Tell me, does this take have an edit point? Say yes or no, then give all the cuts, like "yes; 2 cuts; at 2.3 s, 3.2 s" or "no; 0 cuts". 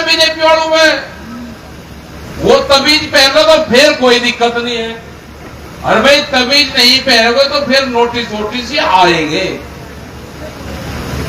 no; 0 cuts